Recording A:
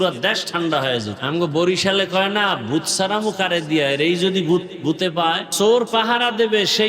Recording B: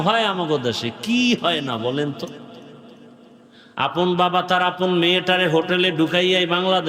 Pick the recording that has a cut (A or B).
A